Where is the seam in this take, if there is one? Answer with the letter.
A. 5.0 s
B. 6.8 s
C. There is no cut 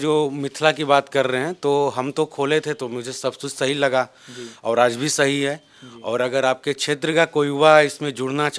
C